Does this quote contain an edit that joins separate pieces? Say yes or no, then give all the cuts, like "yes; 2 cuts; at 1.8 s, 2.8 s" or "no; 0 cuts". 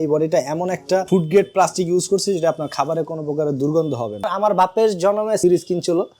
yes; 3 cuts; at 1.1 s, 4.3 s, 5.4 s